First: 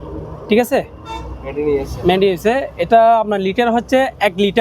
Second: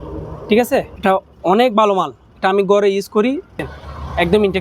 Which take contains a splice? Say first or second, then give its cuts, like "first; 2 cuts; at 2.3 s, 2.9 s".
second; 2 cuts; at 0.9 s, 3.6 s